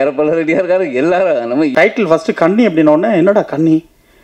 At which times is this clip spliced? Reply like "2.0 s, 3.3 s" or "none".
1.7 s